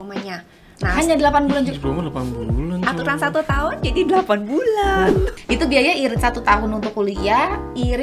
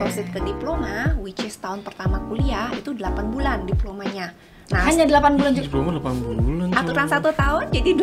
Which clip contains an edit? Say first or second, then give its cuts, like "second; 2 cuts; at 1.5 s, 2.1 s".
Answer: first; 1 cut; at 5.4 s